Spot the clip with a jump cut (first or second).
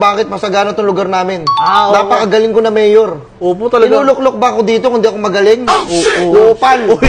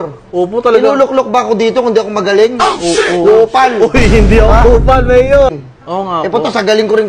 second